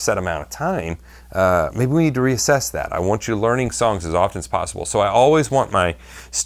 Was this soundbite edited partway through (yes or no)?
no